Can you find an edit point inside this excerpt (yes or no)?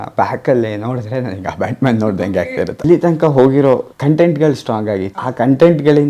yes